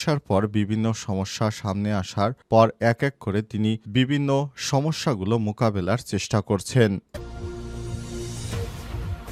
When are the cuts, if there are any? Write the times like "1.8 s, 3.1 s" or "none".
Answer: 7.1 s